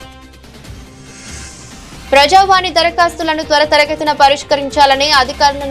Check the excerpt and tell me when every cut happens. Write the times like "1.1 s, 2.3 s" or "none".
1.9 s